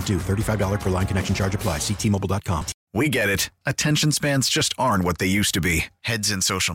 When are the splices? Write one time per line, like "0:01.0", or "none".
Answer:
0:02.8